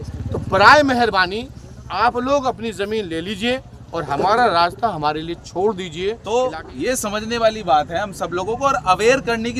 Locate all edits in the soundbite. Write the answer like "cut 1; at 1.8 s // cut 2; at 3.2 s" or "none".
cut 1; at 6.2 s